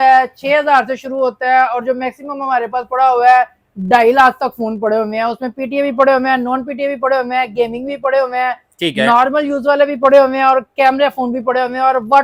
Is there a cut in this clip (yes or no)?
no